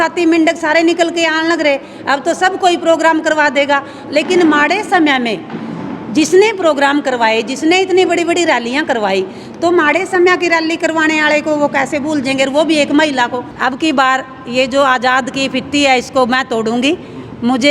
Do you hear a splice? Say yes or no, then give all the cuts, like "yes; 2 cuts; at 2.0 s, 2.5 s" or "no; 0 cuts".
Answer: yes; 1 cut; at 13.5 s